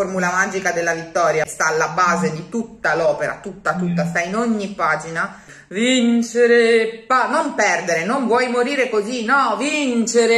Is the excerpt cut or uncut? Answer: cut